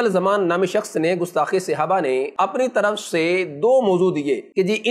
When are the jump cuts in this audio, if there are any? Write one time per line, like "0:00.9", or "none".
none